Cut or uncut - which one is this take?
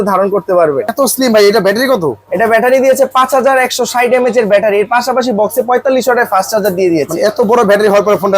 cut